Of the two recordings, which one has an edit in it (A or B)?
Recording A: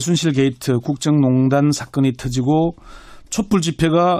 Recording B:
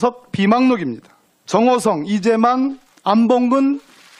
B